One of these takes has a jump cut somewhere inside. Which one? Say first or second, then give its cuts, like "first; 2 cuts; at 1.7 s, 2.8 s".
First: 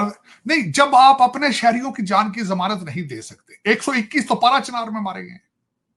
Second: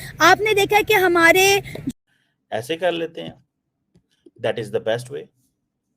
second; 1 cut; at 1.8 s